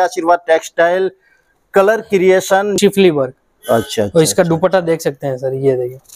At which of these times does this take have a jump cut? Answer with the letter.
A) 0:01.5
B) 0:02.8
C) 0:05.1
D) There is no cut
B